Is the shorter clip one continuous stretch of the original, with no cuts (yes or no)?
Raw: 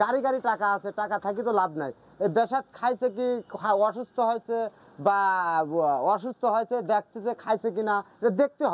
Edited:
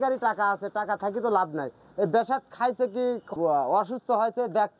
no